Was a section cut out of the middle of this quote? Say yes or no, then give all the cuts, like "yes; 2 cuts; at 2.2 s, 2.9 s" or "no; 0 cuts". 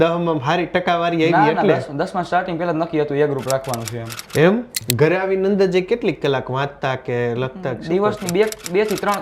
yes; 1 cut; at 4.7 s